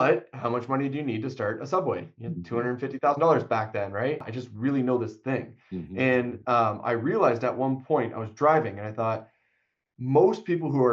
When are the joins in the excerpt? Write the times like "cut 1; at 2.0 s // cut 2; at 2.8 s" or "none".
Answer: cut 1; at 4.3 s